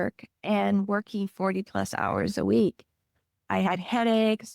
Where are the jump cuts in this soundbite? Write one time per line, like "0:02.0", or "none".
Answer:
0:03.4